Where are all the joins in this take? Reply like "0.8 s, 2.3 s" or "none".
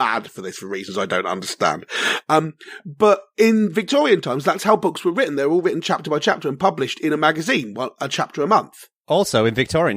9.1 s